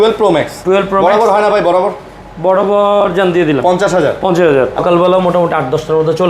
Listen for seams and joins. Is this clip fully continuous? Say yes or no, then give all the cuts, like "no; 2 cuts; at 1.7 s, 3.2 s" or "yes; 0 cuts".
no; 1 cut; at 4.8 s